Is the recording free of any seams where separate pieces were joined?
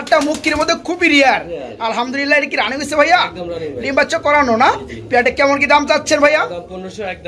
yes; 0 cuts

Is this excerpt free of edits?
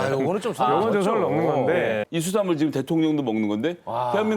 no; 1 cut; at 2.1 s

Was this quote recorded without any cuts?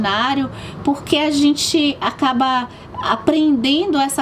yes; 0 cuts

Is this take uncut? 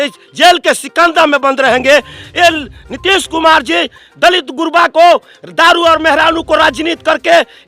yes; 0 cuts

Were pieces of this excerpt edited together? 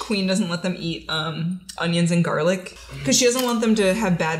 yes; 1 cut; at 2.7 s

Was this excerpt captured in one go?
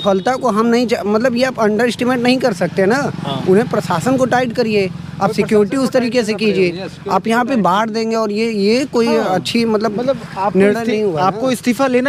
yes; 0 cuts

